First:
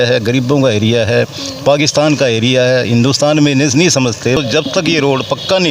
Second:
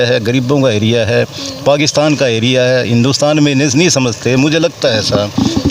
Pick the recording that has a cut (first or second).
first